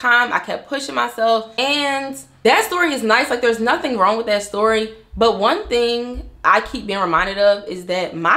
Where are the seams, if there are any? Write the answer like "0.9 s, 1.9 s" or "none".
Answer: 1.5 s